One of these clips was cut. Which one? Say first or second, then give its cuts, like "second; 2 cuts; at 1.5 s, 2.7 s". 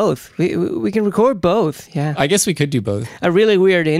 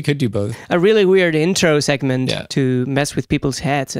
second; 1 cut; at 2.4 s